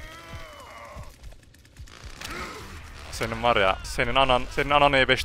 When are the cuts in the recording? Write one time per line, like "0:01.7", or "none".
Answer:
none